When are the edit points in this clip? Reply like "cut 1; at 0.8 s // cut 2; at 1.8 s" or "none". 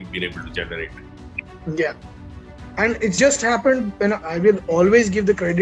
cut 1; at 3.2 s // cut 2; at 4.2 s

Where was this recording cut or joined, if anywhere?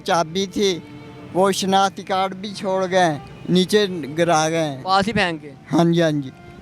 none

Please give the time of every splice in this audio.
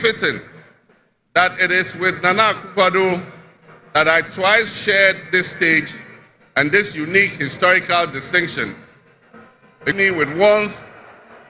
cut 1; at 9.9 s

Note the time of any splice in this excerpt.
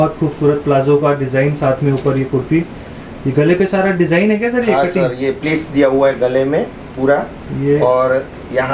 none

